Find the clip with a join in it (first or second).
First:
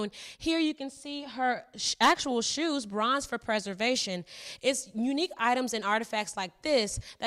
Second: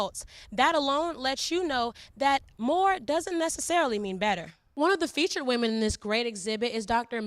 second